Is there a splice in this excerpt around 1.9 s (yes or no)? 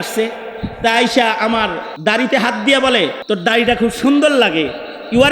yes